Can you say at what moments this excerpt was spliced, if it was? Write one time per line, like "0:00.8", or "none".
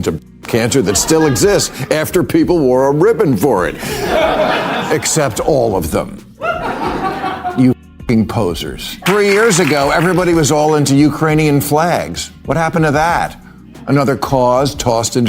0:08.9